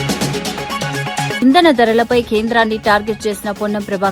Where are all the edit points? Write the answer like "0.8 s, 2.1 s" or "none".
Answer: none

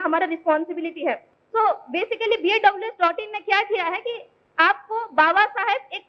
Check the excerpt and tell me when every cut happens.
1.3 s

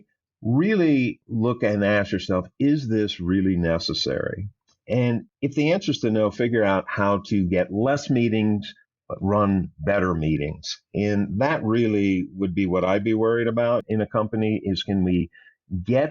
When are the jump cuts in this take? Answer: 1.2 s, 5.3 s, 13.8 s

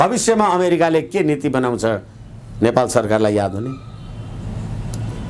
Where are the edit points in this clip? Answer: none

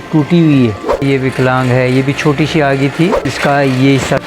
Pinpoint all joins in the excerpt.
1.0 s, 3.3 s

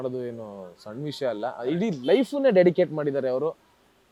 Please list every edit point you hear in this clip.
none

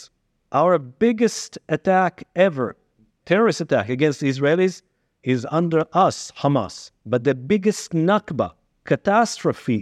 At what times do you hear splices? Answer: none

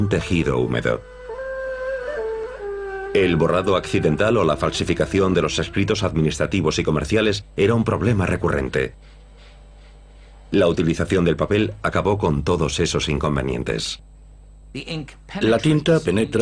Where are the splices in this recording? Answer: 8.1 s

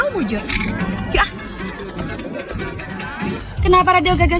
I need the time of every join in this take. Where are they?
3.1 s

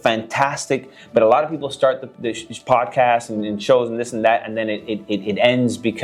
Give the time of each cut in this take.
none

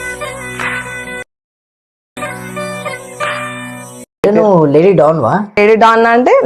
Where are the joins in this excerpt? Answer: 3.9 s, 5.6 s

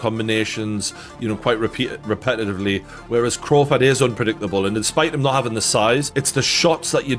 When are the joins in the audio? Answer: none

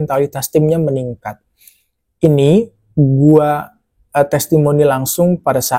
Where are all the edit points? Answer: none

